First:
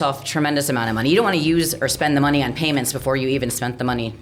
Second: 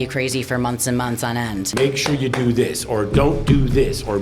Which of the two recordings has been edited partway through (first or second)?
second